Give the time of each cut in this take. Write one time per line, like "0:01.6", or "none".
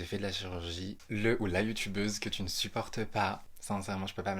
0:01.1
0:03.5